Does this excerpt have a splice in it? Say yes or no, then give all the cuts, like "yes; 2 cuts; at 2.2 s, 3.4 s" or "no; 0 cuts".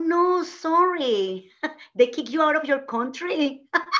no; 0 cuts